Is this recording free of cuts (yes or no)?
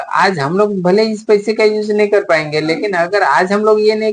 yes